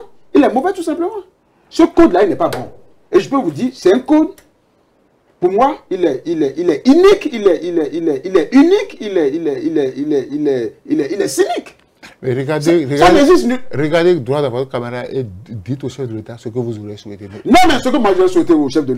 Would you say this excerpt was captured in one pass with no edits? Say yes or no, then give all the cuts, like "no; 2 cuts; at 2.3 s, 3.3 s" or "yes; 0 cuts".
yes; 0 cuts